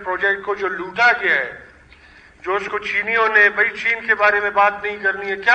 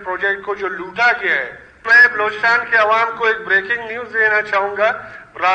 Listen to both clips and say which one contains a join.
second; 1 cut; at 2.0 s

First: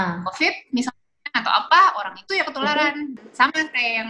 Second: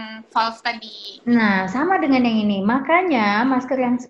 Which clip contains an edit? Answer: first; 1 cut; at 3.2 s

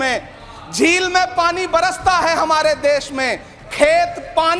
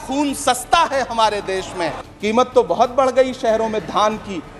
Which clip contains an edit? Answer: second; 1 cut; at 2.0 s

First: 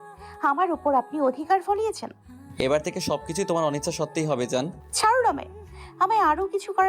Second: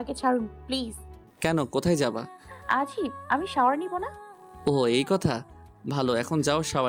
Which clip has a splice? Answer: first; 1 cut; at 4.8 s

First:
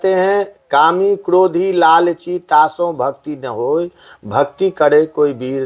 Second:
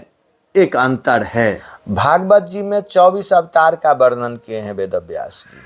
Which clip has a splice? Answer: second; 1 cut; at 1.7 s

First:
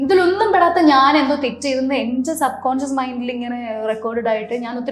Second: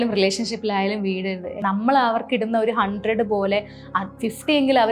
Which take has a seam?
second; 1 cut; at 1.5 s

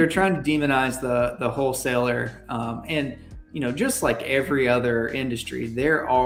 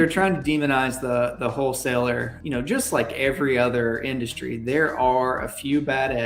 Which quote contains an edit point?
second; 1 cut; at 2.3 s

